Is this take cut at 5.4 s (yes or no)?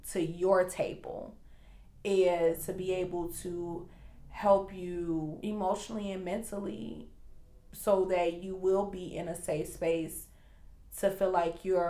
yes